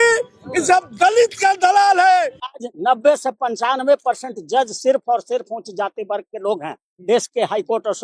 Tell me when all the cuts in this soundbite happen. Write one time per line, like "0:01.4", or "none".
0:02.7